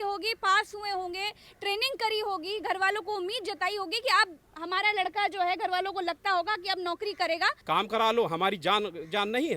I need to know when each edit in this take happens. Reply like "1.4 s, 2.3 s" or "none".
7.6 s